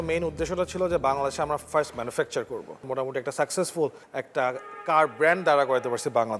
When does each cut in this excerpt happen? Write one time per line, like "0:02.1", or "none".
0:02.9
0:04.1